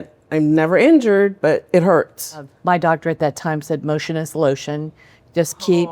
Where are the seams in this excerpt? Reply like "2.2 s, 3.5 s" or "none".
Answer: 2.5 s